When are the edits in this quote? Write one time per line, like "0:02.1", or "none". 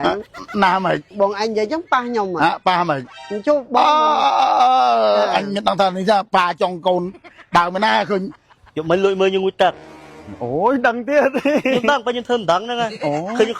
0:01.1
0:08.4